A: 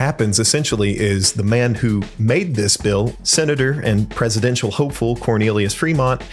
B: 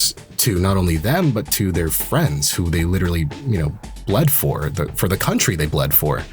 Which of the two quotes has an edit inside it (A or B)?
A